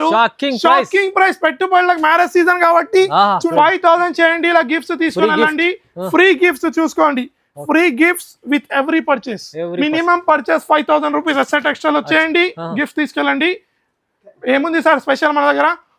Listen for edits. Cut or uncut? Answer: cut